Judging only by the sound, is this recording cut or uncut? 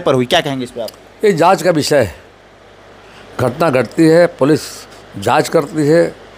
uncut